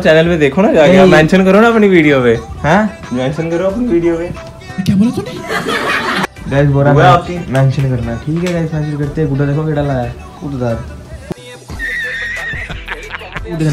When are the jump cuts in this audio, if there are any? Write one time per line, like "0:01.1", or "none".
none